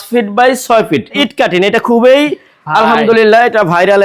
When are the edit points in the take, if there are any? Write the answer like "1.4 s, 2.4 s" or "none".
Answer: 1.1 s